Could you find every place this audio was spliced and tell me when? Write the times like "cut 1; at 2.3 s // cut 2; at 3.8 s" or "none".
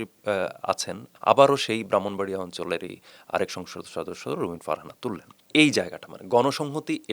cut 1; at 1.0 s // cut 2; at 5.3 s